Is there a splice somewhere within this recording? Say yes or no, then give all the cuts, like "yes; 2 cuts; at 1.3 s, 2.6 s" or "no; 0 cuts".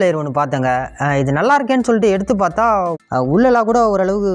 yes; 1 cut; at 2.9 s